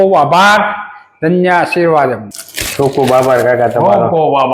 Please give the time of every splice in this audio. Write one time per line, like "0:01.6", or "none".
0:02.2